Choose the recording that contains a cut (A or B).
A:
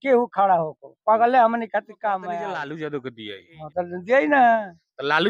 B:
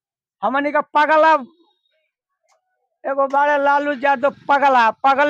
A